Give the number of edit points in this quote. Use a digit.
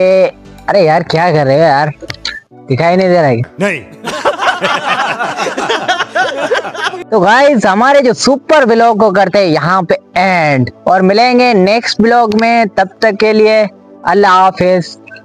0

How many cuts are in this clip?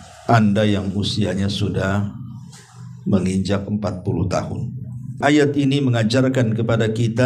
1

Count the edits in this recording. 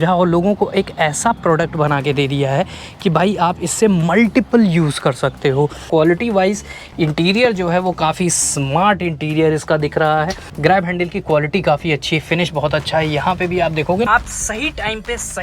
3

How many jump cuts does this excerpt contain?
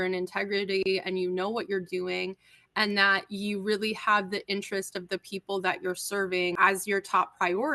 1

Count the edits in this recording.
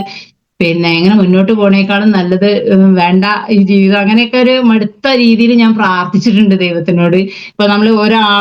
1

